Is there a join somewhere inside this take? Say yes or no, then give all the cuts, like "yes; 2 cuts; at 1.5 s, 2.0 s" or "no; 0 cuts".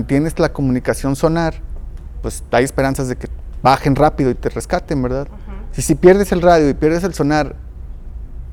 no; 0 cuts